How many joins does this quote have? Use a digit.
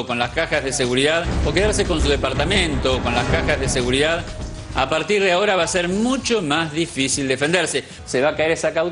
0